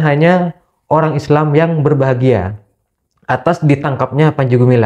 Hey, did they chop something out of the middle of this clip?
no; 0 cuts

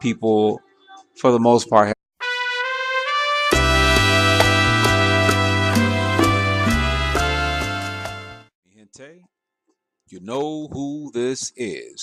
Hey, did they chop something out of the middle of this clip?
no; 0 cuts

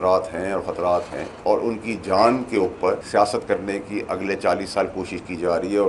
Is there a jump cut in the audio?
yes; 2 cuts; at 1.2 s, 3.0 s

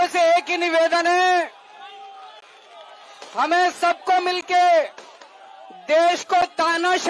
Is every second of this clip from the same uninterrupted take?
yes; 0 cuts

